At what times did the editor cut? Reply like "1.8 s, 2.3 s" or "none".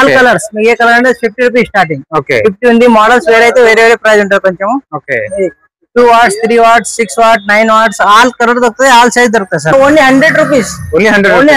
9.7 s